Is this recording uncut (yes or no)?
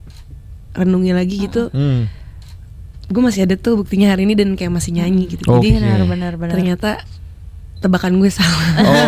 yes